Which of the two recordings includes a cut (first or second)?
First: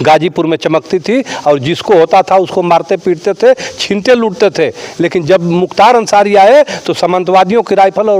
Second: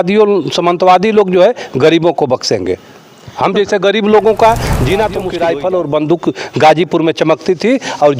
second